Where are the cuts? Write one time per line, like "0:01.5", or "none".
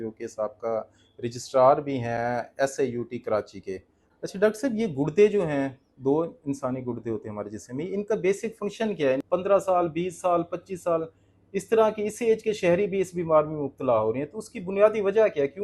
0:03.9
0:09.2